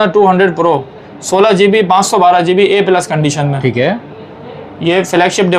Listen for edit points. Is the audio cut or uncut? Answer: uncut